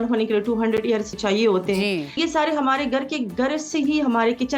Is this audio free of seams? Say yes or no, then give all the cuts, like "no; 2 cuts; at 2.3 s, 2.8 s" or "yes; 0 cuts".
no; 2 cuts; at 1.2 s, 2.2 s